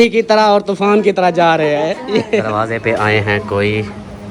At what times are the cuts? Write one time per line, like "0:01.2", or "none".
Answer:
0:02.6